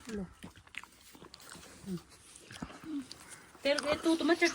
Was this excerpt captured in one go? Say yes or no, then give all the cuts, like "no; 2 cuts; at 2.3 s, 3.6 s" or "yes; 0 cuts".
yes; 0 cuts